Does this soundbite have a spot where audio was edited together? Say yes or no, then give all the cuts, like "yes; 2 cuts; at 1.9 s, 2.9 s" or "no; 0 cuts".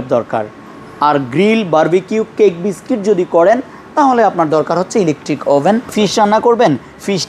yes; 1 cut; at 5.9 s